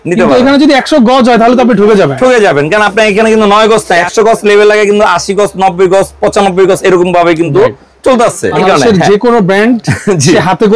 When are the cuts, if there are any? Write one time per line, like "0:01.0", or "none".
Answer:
0:04.1
0:08.6